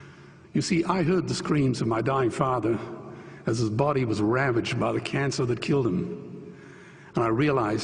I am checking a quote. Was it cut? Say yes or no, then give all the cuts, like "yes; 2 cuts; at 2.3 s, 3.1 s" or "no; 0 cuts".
no; 0 cuts